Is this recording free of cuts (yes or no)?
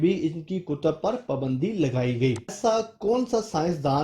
no